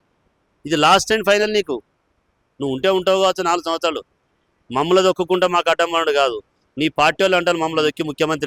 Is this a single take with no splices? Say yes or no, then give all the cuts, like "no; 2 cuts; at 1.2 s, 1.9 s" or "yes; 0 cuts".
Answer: yes; 0 cuts